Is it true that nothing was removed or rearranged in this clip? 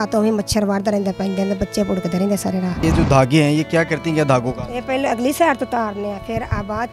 no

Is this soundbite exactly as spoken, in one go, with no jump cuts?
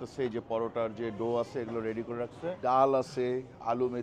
no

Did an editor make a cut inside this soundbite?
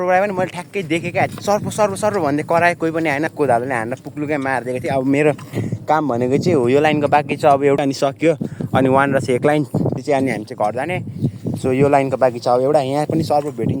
yes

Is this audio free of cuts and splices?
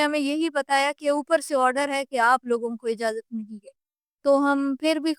yes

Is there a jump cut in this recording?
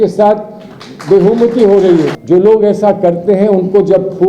yes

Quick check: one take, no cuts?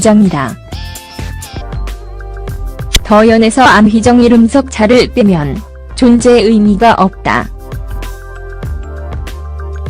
yes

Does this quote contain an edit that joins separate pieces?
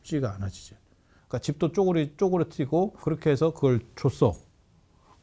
yes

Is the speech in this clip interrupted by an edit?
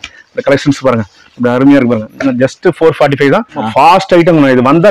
yes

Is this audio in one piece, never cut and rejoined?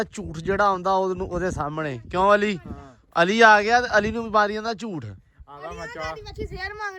yes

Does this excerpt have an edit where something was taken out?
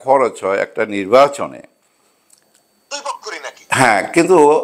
no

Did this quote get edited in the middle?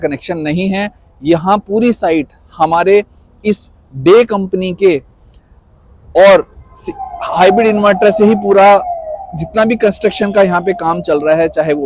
no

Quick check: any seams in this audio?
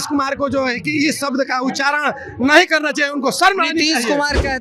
no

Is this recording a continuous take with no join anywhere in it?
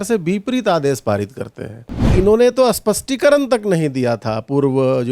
no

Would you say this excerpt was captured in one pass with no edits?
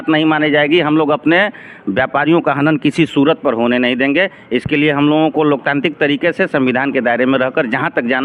yes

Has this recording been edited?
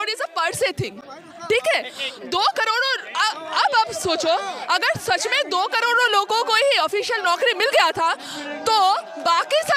no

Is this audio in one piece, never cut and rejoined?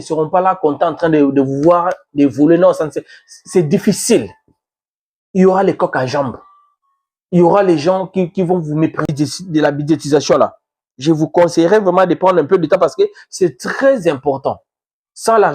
no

